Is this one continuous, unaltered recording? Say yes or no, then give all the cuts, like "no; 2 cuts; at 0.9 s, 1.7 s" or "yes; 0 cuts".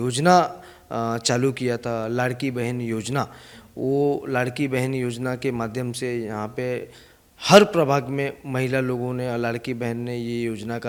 yes; 0 cuts